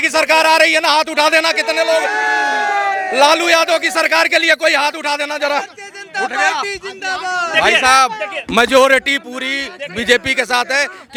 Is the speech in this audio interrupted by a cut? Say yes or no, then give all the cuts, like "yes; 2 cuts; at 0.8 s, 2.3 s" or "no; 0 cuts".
no; 0 cuts